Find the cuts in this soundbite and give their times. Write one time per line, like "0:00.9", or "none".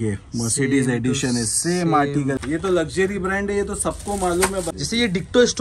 0:02.4
0:04.7